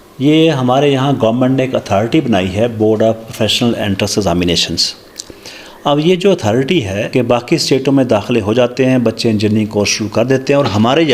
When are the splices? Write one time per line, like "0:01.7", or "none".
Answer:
0:07.0